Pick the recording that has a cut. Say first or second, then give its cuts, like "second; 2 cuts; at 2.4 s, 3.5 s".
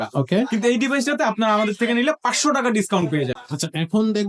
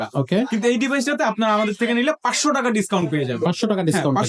first; 1 cut; at 3.3 s